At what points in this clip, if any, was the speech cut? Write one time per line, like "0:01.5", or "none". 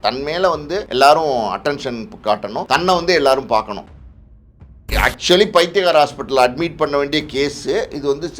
0:00.9
0:02.6
0:04.3